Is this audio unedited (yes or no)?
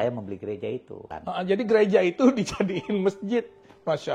no